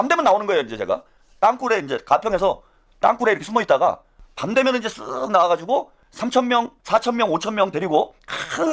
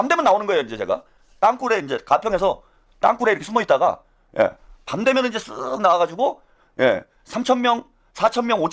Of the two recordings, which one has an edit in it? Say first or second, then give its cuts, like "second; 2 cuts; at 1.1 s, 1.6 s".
first; 2 cuts; at 4.2 s, 6.3 s